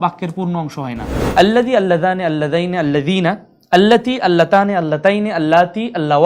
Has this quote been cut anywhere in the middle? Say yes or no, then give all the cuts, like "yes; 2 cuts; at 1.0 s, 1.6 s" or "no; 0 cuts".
yes; 1 cut; at 1.1 s